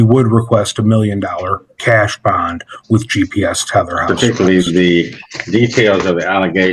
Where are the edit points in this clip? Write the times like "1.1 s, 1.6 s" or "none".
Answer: 4.0 s